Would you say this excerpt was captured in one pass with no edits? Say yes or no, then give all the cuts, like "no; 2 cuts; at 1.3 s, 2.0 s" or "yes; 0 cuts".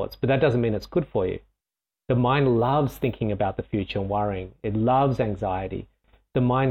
yes; 0 cuts